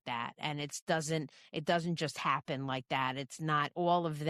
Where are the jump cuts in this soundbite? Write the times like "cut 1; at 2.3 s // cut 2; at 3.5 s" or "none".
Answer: none